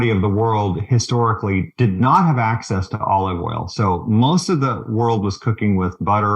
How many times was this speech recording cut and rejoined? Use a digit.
0